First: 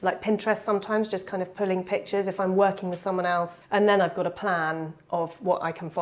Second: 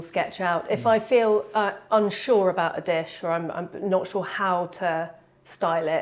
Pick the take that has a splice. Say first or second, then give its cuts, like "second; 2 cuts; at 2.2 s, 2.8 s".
first; 1 cut; at 3.5 s